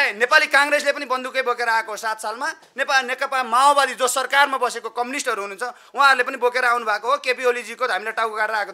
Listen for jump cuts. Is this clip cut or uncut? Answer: uncut